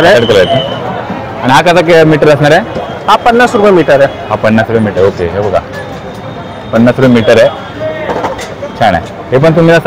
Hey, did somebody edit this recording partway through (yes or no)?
no